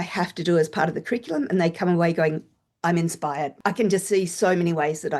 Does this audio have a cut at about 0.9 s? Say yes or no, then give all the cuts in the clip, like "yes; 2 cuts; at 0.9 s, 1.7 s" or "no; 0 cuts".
no; 1 cut; at 3.5 s